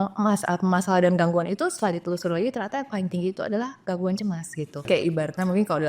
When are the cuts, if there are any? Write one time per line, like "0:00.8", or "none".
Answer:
0:04.9